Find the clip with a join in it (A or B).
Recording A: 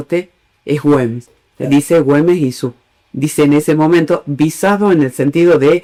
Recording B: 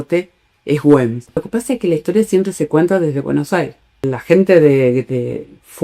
B